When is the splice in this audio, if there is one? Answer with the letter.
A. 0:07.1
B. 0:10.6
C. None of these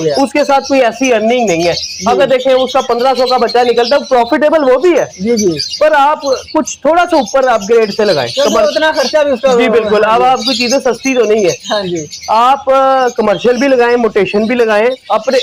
C